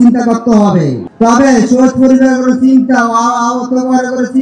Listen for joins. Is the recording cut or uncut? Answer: cut